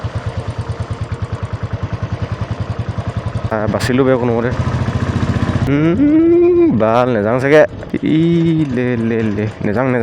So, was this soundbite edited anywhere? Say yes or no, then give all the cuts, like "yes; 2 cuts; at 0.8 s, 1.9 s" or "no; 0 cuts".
yes; 3 cuts; at 3.5 s, 5.7 s, 7.9 s